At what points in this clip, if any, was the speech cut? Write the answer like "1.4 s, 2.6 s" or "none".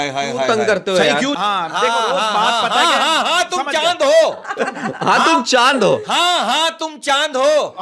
1.4 s